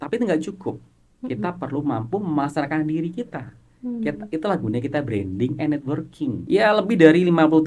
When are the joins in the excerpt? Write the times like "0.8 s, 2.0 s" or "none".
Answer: 6.4 s